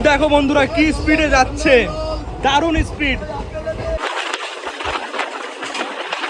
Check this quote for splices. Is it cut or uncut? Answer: cut